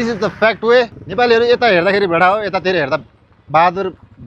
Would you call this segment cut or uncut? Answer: cut